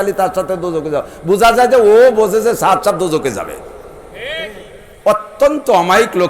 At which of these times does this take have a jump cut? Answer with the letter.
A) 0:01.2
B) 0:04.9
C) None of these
B